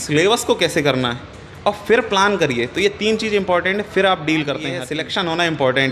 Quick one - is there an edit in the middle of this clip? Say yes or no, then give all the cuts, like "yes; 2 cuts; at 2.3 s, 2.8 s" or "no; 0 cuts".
yes; 1 cut; at 4.8 s